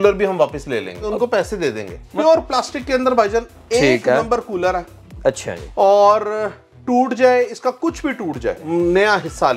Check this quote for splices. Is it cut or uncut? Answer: cut